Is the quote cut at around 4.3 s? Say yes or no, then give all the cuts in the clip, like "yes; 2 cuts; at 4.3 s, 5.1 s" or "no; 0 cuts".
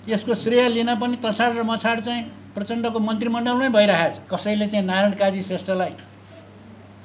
yes; 1 cut; at 4.3 s